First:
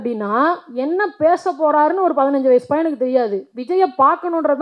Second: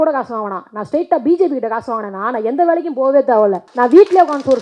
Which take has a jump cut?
second; 1 cut; at 3.6 s

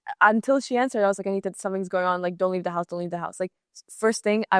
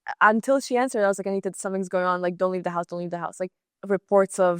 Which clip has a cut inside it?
second; 1 cut; at 3.7 s

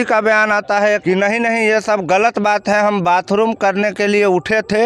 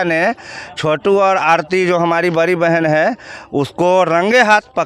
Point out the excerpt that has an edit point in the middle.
first; 1 cut; at 1.0 s

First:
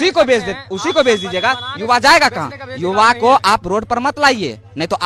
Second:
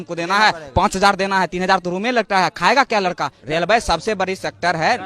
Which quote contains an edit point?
second; 1 cut; at 3.3 s

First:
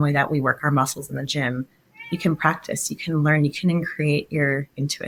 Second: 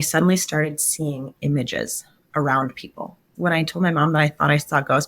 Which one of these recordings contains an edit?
second; 1 cut; at 3.3 s

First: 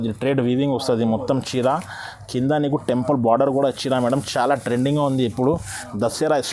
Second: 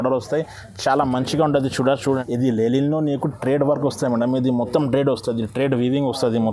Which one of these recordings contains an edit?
second; 1 cut; at 2.2 s

